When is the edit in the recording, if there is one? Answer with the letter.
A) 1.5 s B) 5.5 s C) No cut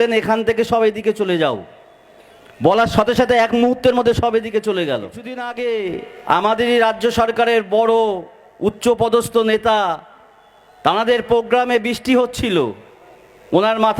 B